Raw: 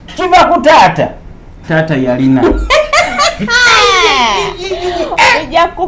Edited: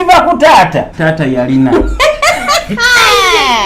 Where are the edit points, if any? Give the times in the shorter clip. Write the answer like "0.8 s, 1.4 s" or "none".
0.9 s